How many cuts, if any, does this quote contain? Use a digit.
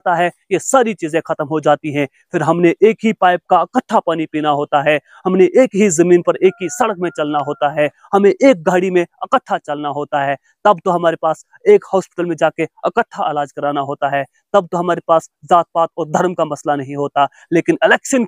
0